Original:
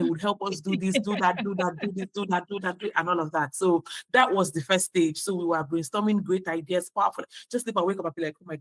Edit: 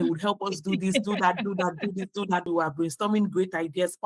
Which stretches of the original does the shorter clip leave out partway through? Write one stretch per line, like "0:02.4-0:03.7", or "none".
0:02.5-0:05.4